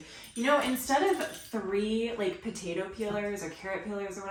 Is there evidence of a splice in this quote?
no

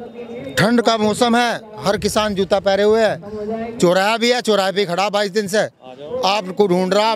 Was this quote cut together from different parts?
no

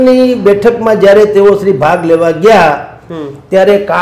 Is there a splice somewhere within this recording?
no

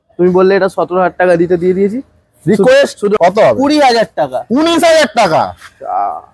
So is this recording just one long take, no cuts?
no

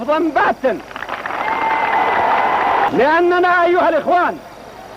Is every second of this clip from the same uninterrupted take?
no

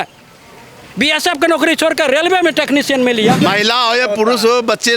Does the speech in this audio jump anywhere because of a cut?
yes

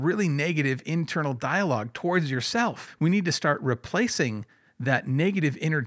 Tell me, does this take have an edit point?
yes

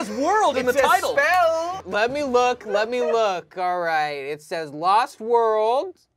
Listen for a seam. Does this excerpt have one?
yes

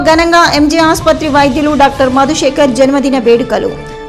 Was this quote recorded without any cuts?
yes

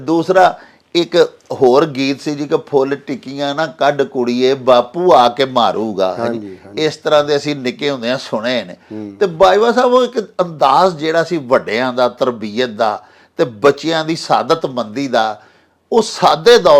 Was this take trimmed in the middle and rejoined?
no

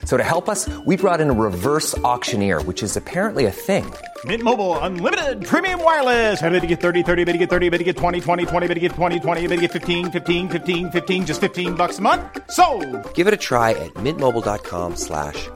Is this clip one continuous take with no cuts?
yes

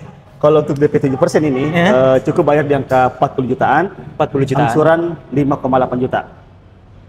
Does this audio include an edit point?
no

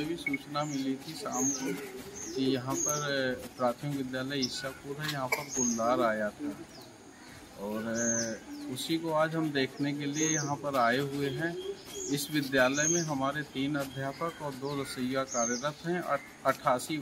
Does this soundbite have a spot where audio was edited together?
no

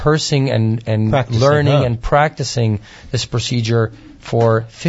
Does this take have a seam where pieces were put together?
no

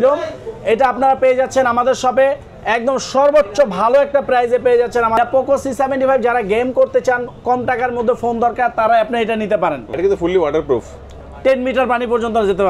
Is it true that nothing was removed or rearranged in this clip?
no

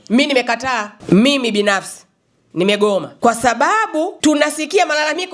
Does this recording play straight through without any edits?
no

